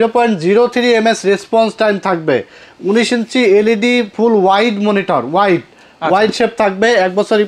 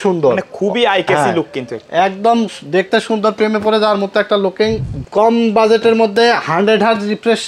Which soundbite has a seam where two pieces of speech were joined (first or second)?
second